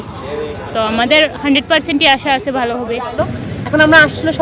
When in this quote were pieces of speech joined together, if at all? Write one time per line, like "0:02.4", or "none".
0:03.2